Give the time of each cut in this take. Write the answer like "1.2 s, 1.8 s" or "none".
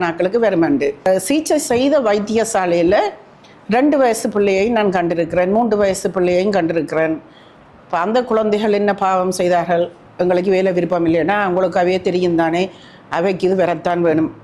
1.1 s, 10.0 s